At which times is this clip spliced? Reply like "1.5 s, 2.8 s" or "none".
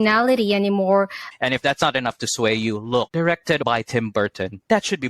1.2 s, 3.6 s